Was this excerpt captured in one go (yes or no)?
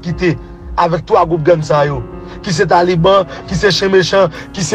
yes